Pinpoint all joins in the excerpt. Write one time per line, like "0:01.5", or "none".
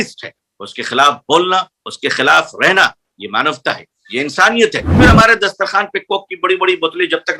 0:05.0